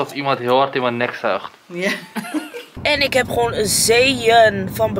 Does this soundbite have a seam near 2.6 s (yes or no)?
yes